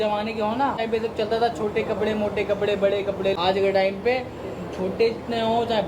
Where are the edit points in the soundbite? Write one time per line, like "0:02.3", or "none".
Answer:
0:00.8
0:03.3